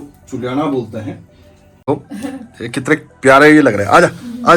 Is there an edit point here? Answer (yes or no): yes